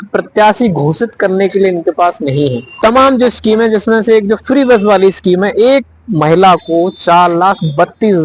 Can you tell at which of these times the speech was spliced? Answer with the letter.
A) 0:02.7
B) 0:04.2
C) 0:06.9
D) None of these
A